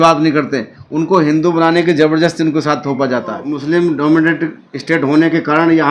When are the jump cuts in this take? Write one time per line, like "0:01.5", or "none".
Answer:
0:03.5